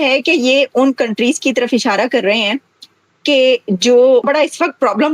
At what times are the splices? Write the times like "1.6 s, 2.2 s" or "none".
4.2 s